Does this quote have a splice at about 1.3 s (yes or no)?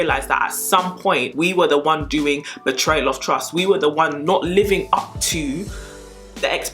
yes